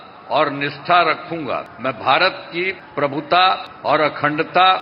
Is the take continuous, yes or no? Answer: no